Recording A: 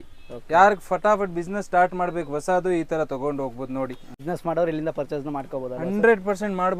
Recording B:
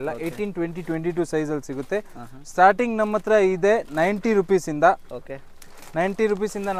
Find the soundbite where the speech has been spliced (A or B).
A